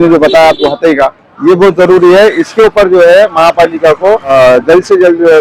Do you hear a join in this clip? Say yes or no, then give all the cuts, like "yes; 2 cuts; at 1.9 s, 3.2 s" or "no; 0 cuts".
yes; 1 cut; at 4.3 s